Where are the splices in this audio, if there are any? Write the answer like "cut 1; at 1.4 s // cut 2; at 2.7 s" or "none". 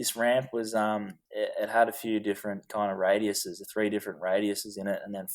cut 1; at 1.2 s